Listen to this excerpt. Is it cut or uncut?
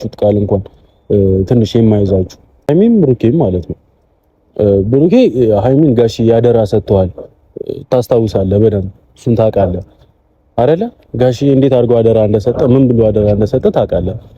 cut